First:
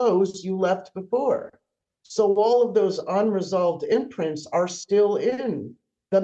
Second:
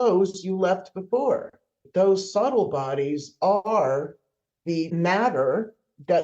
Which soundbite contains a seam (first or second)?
second